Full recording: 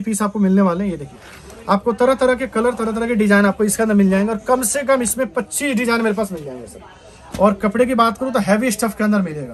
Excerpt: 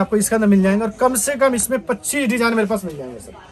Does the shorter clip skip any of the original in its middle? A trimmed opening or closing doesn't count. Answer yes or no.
no